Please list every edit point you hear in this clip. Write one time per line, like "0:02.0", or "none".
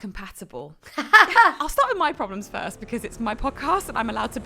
0:01.6